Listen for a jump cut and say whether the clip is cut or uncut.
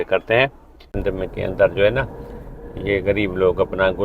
cut